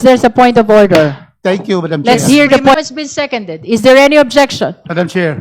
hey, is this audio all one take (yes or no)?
no